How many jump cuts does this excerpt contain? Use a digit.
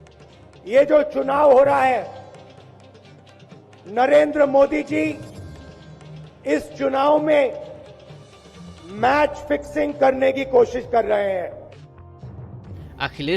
2